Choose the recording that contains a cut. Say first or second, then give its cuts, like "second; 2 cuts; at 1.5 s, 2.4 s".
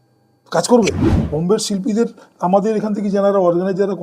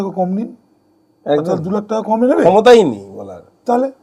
first; 1 cut; at 1.1 s